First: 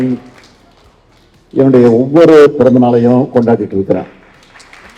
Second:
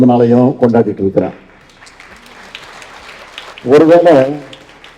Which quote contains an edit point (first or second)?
second